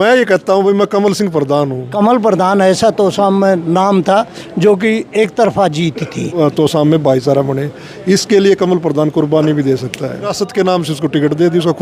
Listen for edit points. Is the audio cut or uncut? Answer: cut